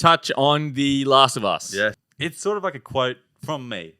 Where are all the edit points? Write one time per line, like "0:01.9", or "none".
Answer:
0:02.0